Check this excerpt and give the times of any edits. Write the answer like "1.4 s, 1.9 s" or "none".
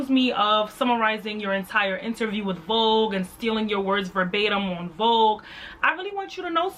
none